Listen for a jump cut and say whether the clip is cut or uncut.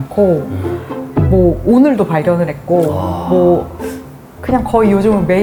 uncut